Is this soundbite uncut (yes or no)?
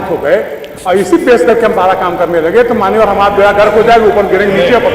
yes